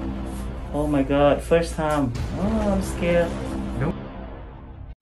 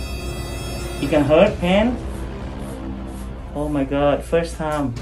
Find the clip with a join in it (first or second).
second